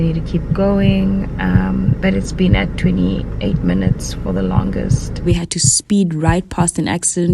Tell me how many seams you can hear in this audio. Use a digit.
1